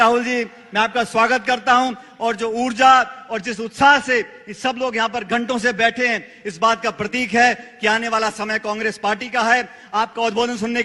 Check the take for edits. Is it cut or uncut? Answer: uncut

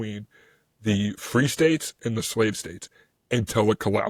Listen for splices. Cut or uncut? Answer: uncut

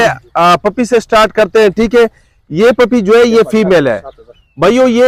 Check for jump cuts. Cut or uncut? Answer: uncut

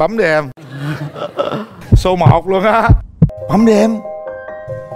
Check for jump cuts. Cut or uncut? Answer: cut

